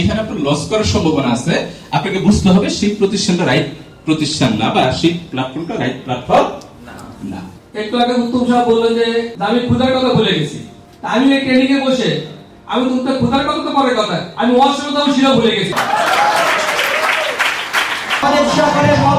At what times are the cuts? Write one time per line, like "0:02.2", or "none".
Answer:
0:07.6
0:18.2